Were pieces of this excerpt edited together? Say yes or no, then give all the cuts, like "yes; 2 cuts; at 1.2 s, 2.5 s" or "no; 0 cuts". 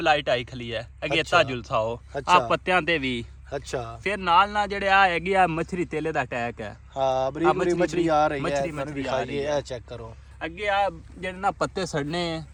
no; 0 cuts